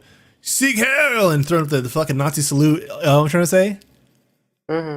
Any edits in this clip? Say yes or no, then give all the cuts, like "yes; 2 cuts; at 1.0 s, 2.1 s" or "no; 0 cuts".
no; 0 cuts